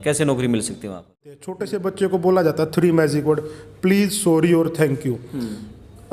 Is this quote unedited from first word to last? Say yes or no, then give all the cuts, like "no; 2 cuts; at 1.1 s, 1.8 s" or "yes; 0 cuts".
no; 1 cut; at 1.2 s